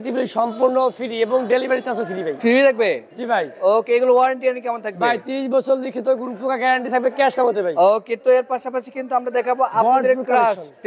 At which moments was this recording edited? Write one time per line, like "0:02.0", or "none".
none